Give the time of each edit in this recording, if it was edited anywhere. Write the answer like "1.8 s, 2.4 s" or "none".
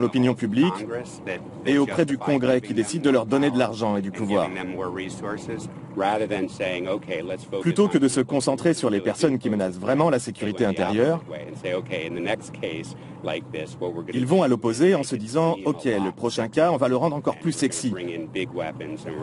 3.3 s

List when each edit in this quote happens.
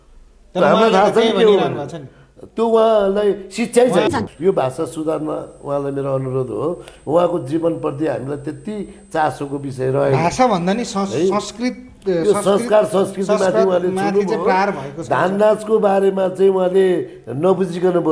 4.1 s

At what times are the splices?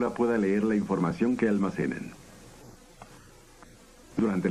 none

